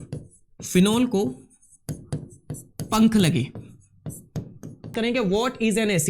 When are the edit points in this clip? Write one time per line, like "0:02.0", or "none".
0:04.9